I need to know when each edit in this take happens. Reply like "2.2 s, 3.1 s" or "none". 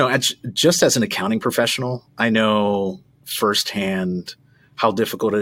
none